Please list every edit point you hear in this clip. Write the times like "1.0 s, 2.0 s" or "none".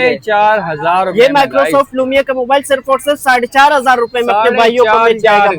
none